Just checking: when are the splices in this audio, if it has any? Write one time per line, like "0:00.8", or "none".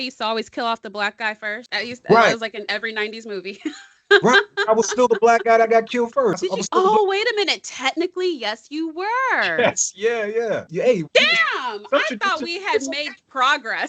0:01.6
0:06.4
0:10.7